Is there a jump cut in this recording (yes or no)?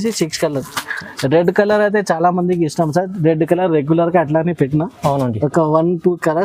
no